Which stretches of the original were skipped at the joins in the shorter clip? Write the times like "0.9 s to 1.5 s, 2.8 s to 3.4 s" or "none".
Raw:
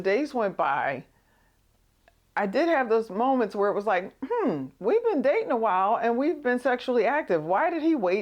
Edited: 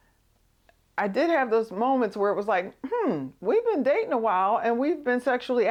none